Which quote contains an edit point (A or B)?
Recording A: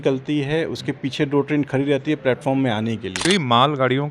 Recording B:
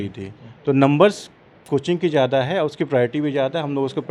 A